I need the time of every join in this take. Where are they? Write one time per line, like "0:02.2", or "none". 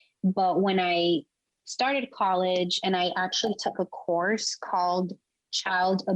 none

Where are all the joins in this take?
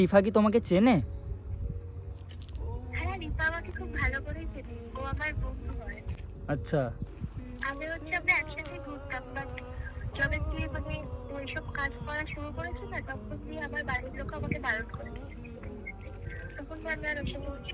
none

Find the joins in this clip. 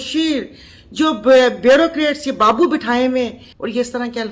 0:03.4

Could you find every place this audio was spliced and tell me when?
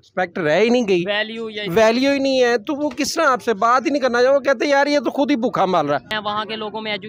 0:06.1

